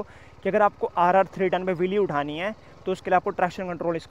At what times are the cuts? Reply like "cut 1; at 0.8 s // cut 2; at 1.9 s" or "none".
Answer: none